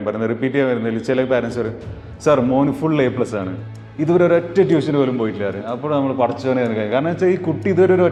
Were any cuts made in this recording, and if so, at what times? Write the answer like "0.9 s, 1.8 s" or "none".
none